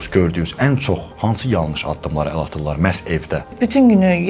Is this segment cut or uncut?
cut